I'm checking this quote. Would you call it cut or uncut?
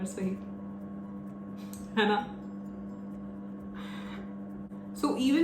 uncut